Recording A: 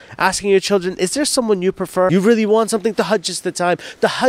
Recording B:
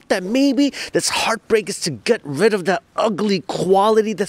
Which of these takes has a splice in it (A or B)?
A